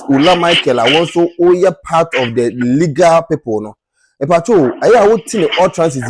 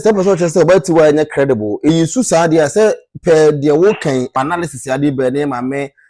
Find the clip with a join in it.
second; 2 cuts; at 1.9 s, 4.3 s

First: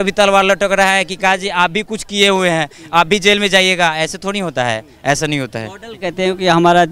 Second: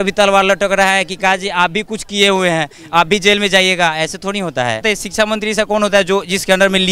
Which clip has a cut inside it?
second; 1 cut; at 4.8 s

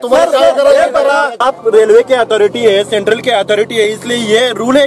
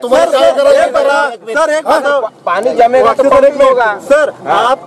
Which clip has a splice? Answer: first; 1 cut; at 1.4 s

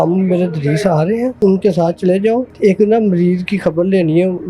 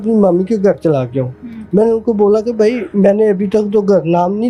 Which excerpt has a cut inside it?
first; 1 cut; at 1.4 s

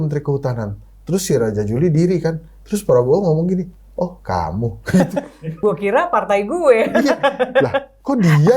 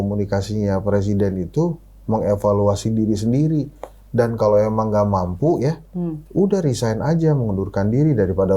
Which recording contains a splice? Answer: first; 1 cut; at 5.5 s

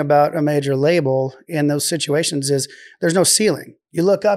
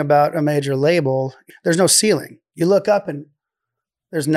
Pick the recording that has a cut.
second; 1 cut; at 1.4 s

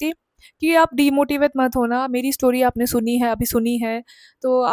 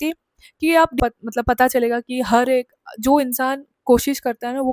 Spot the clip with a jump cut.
second; 1 cut; at 1.0 s

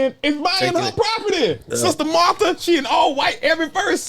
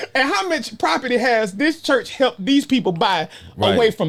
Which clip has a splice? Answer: first; 1 cut; at 1.7 s

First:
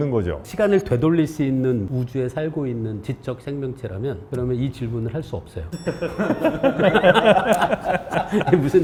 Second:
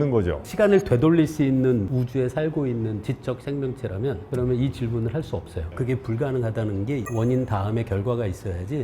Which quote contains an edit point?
second; 2 cuts; at 5.7 s, 7.1 s

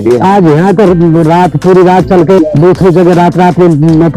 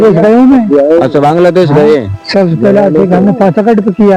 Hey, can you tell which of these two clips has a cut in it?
first; 1 cut; at 2.4 s

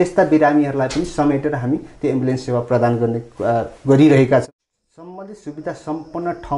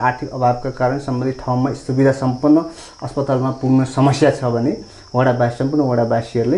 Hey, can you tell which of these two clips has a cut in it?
first; 1 cut; at 4.5 s

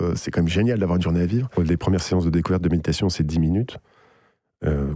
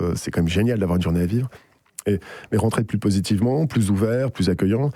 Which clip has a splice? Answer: first; 1 cut; at 1.5 s

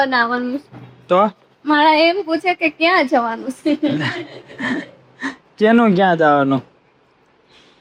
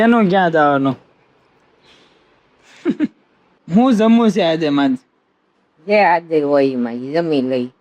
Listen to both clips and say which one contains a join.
second; 1 cut; at 3.7 s

